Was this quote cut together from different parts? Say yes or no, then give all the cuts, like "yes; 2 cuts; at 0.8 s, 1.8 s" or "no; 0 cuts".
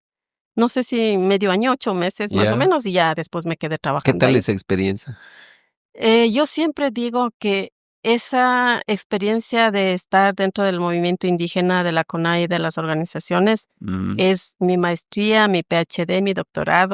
no; 0 cuts